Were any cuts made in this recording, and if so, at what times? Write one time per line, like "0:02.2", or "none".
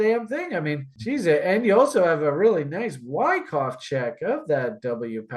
0:00.9